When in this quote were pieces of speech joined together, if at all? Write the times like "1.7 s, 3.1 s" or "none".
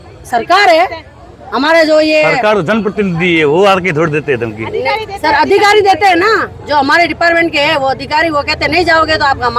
none